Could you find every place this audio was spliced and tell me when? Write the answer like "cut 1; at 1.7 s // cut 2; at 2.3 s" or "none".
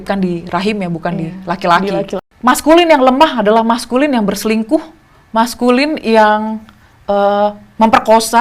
cut 1; at 2.2 s